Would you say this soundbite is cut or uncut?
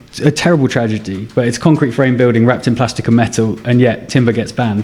uncut